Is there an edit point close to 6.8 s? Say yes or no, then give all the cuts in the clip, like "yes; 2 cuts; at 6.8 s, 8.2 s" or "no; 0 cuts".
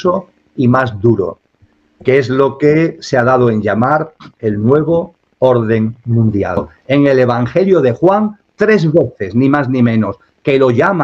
yes; 1 cut; at 6.8 s